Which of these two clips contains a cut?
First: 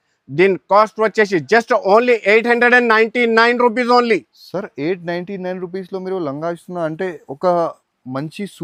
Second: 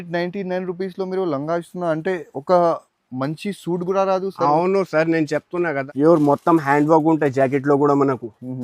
second; 1 cut; at 5.8 s

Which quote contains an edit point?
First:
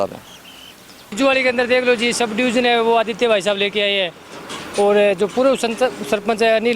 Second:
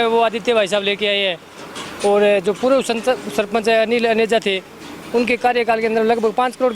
first; 1 cut; at 1.1 s

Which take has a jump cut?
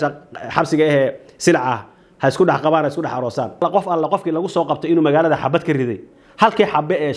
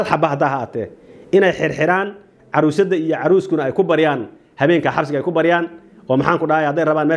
first; 1 cut; at 3.6 s

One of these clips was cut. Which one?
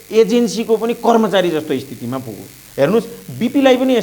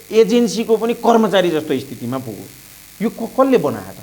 first; 1 cut; at 2.6 s

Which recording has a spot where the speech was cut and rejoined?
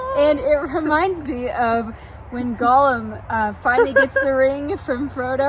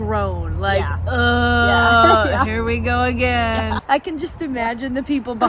second; 1 cut; at 3.8 s

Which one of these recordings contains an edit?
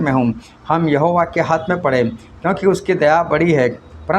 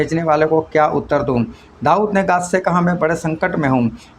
second; 1 cut; at 1.6 s

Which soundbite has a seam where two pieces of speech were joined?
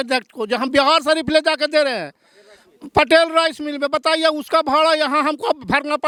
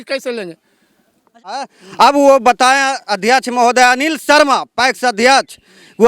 second; 1 cut; at 1.6 s

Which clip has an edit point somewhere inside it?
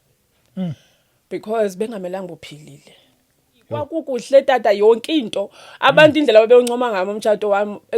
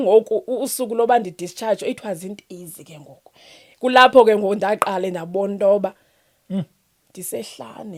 first; 1 cut; at 3.9 s

